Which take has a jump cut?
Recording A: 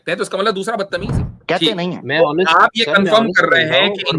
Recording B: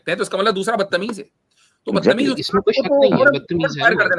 A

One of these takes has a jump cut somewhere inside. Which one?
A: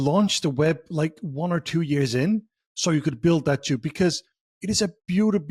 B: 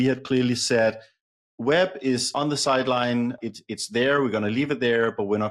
B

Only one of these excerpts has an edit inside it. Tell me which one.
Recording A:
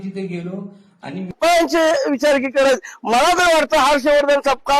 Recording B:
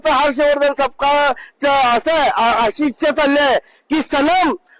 A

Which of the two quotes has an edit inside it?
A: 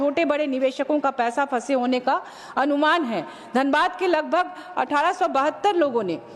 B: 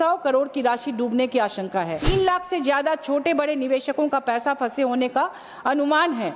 B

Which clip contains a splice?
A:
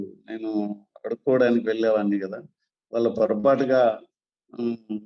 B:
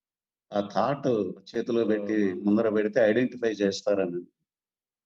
B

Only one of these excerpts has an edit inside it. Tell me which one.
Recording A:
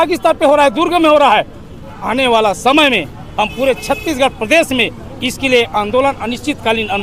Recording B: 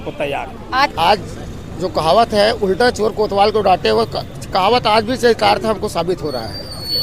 B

